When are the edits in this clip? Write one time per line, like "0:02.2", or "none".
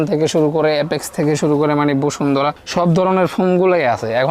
none